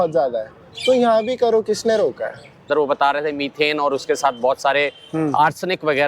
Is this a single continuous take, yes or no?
no